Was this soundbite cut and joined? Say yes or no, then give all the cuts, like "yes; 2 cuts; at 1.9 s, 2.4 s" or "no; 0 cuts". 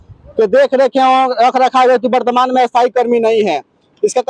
no; 0 cuts